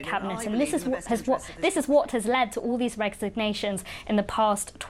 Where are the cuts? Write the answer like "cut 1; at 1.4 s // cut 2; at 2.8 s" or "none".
cut 1; at 1.0 s